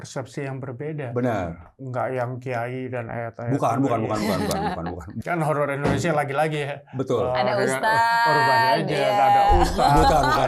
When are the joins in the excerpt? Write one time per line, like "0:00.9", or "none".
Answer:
0:01.7
0:05.1